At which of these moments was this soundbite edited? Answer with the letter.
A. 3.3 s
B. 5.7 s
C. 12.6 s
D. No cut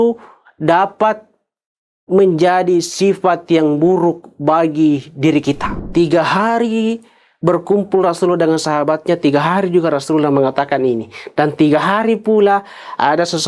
B